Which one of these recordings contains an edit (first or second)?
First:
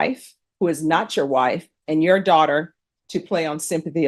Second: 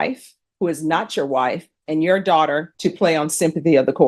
second